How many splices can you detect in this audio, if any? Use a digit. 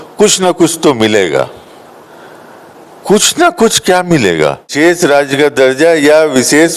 1